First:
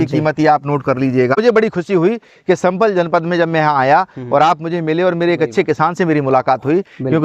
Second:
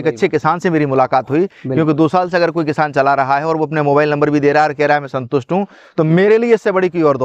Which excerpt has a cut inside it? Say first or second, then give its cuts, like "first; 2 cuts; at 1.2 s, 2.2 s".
first; 1 cut; at 1.4 s